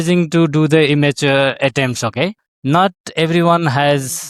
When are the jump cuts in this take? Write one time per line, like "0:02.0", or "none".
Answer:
0:02.5

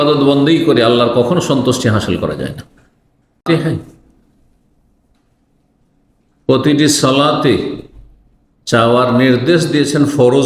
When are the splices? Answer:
0:03.4

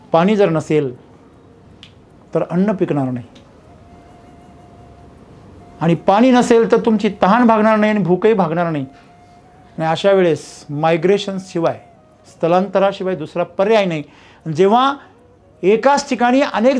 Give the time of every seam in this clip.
none

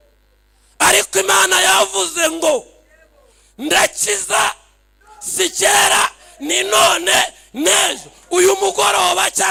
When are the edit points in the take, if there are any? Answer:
none

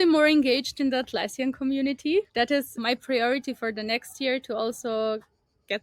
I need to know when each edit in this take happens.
0:02.8

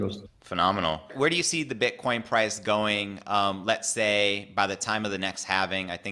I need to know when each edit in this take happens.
0:01.1

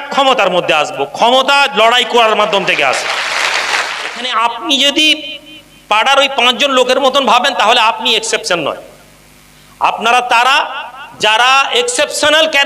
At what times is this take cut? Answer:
0:04.1

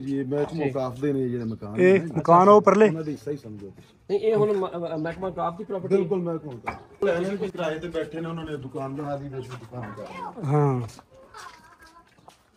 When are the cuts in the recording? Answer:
0:07.0

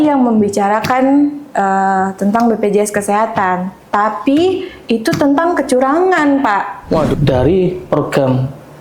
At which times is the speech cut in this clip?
0:07.1

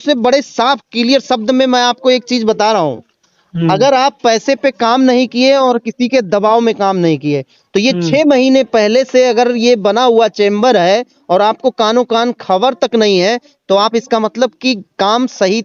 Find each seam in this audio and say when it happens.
none

